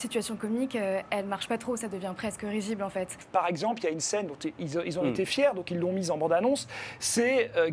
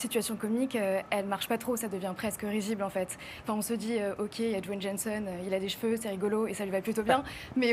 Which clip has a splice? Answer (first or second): first